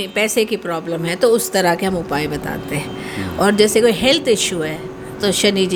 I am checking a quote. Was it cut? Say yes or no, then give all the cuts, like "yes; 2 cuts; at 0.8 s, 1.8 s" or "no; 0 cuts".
no; 0 cuts